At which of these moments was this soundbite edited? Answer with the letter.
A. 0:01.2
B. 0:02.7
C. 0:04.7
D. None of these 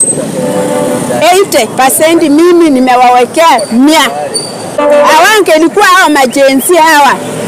C